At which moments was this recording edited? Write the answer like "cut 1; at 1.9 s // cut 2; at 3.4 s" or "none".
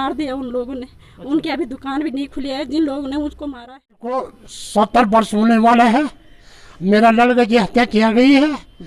cut 1; at 4.1 s